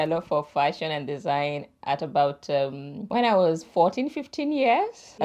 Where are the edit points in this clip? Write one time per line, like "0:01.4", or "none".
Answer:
none